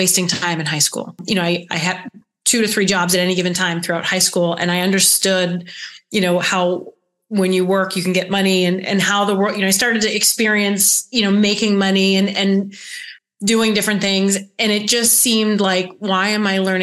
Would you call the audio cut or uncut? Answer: cut